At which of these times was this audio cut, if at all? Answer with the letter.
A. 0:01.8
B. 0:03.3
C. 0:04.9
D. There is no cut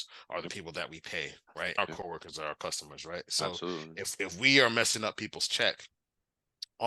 A